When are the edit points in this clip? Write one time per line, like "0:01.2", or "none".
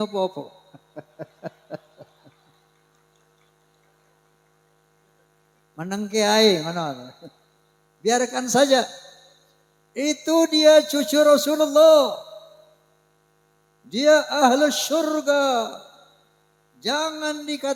none